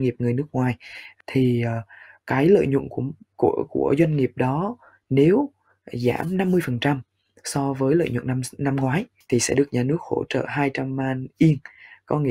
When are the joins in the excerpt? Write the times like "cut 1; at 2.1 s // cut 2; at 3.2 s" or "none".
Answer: none